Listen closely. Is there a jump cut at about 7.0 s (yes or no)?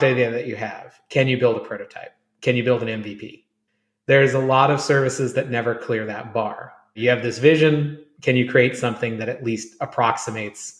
yes